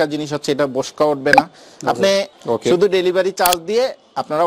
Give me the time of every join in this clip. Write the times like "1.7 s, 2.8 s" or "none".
2.3 s

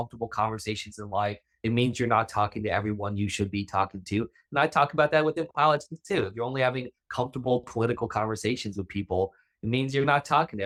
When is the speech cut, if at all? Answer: none

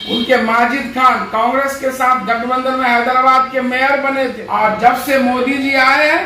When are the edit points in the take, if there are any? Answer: 4.4 s

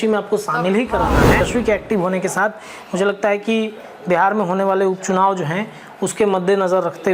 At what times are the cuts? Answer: 1.4 s

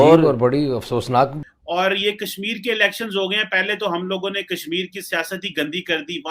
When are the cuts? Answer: 1.4 s

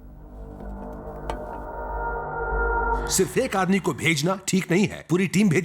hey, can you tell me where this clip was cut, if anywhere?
3.1 s

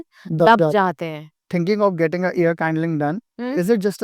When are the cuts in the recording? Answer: 1.3 s

